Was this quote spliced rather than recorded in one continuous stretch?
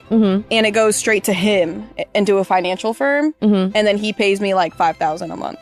no; 0 cuts

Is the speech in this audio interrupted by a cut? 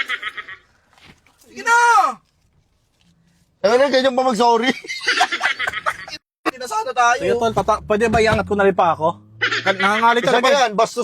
yes; 1 cut; at 6.5 s

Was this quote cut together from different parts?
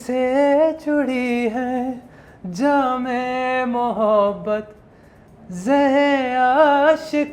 no; 0 cuts

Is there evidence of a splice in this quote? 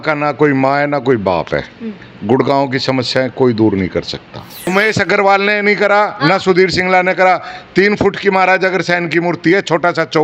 yes; 1 cut; at 4.7 s

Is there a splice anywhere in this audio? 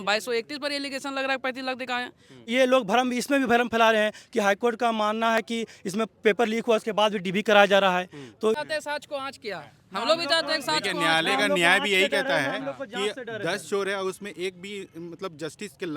yes; 2 cuts; at 2.5 s, 8.6 s

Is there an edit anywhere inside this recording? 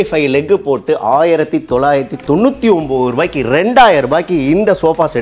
no; 0 cuts

